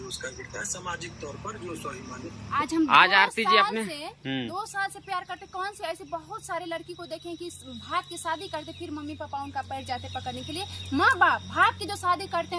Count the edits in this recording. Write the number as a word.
one